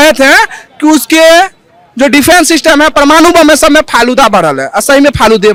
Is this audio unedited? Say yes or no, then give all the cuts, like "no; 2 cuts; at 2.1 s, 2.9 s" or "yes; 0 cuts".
yes; 0 cuts